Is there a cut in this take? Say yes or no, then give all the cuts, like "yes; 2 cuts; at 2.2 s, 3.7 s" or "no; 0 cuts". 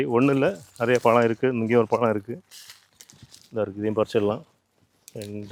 no; 0 cuts